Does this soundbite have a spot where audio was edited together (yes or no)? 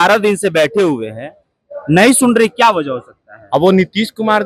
no